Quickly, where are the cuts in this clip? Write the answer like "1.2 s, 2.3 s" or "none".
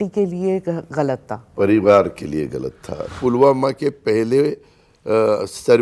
3.1 s